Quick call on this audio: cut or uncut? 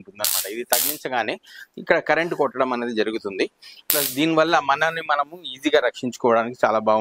uncut